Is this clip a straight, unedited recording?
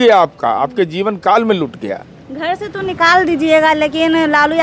yes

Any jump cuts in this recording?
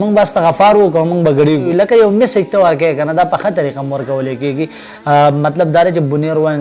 yes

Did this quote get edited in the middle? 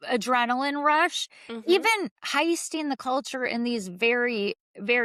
no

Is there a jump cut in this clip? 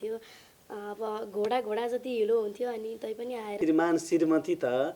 yes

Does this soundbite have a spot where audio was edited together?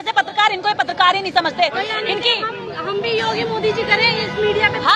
no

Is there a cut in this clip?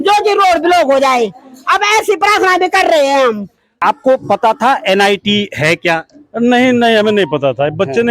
yes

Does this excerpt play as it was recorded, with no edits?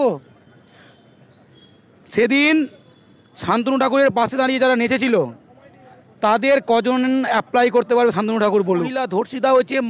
no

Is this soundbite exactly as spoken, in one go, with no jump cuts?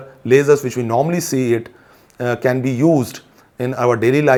yes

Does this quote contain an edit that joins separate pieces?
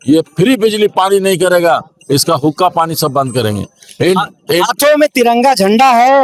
no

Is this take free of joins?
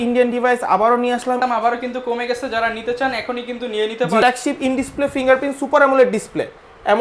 no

